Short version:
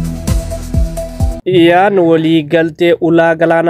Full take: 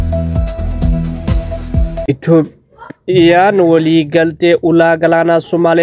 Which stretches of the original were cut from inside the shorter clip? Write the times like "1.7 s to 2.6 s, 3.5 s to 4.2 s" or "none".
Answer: 2.0 s to 2.6 s

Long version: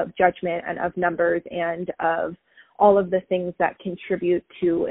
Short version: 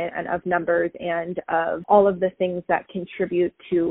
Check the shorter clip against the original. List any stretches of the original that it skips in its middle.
2.3 s to 2.7 s

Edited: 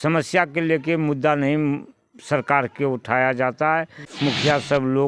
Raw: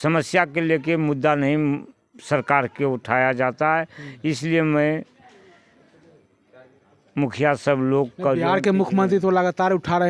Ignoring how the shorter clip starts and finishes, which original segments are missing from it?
4.0 s to 7.0 s

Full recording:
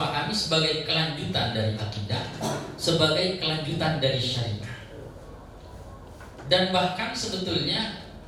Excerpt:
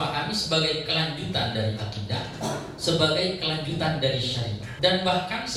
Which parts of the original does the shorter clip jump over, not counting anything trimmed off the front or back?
4.6 s to 6.3 s

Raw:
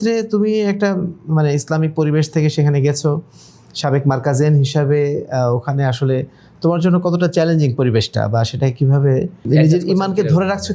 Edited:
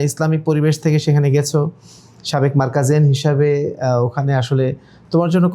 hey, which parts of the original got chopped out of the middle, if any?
none

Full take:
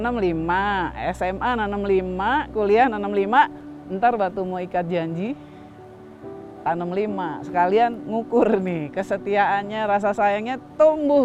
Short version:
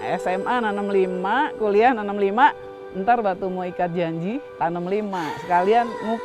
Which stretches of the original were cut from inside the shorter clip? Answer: 5.4 s to 6.5 s

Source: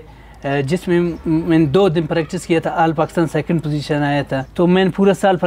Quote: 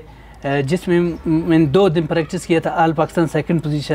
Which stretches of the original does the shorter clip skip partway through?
none

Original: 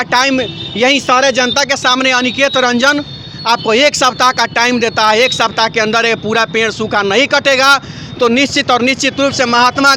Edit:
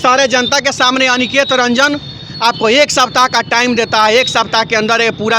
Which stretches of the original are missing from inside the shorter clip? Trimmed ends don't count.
none

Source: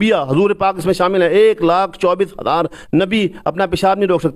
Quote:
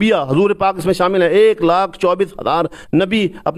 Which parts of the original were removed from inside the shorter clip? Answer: none

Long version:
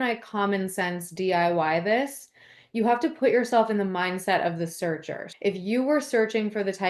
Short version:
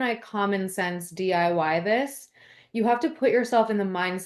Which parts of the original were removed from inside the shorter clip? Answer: none

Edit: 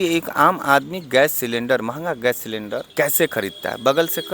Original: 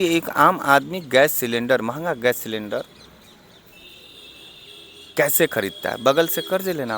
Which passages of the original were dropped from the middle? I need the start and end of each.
2.9 s to 5.1 s

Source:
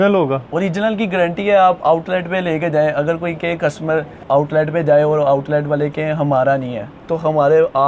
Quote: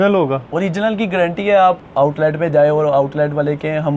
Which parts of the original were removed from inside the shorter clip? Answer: 1.8 s to 4.1 s

